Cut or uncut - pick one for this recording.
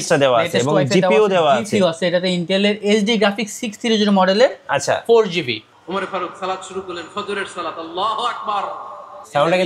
cut